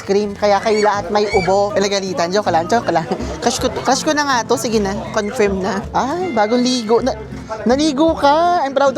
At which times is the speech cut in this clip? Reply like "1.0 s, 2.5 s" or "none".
1.7 s, 5.8 s